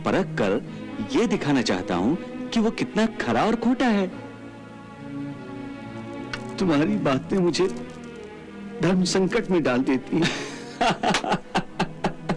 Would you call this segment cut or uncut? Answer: uncut